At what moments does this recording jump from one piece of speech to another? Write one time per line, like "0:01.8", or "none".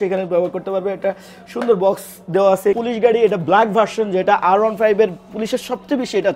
0:02.8